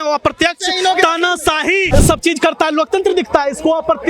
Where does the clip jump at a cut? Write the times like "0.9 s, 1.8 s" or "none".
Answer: 1.9 s